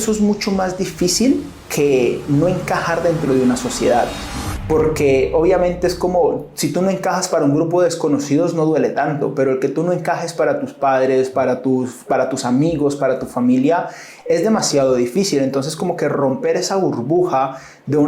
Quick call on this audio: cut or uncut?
uncut